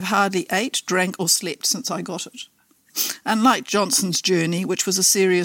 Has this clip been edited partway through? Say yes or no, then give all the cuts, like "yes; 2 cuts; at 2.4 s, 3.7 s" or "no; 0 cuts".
yes; 1 cut; at 2.9 s